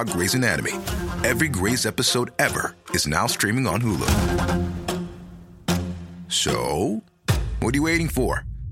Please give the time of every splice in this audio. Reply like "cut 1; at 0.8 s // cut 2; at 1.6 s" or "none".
none